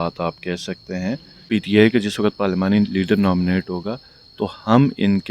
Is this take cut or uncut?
cut